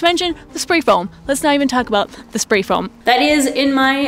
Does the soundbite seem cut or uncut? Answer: cut